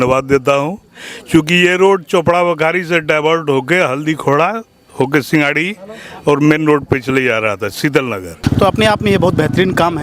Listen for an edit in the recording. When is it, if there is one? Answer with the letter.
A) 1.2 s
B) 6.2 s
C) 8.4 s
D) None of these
C